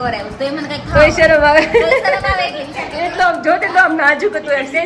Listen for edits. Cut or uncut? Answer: uncut